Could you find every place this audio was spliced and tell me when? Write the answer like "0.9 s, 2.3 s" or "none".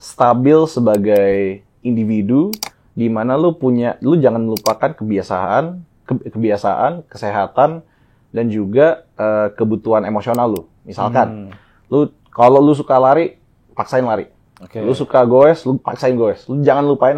none